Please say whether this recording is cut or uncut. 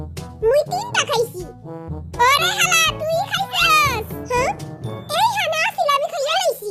uncut